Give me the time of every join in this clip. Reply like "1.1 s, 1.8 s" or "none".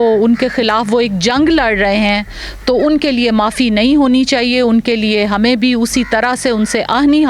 none